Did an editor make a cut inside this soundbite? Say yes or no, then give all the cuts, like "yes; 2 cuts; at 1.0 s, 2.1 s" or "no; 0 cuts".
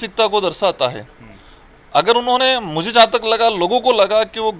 no; 0 cuts